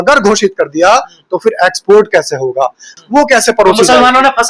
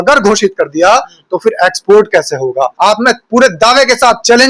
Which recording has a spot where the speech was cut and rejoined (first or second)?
second